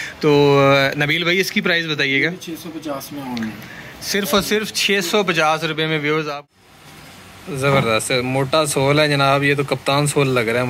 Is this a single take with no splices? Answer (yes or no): no